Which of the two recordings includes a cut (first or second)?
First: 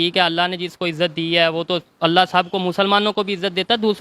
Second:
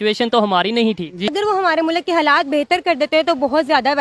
second